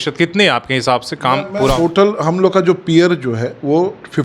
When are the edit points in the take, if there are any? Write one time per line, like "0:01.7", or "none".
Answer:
0:01.8

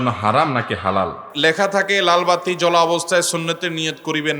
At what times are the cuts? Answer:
0:01.2

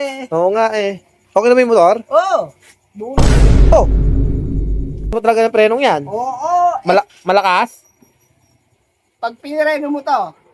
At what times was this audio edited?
0:05.1

